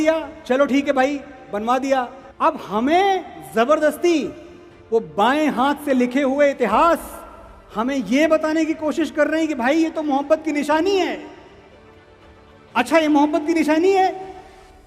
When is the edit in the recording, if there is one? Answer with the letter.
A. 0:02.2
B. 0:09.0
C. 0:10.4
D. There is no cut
A